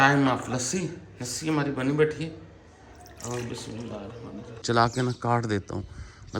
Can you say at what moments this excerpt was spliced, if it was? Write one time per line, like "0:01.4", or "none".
0:04.6